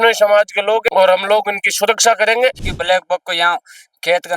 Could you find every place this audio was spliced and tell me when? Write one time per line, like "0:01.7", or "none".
0:00.8
0:02.7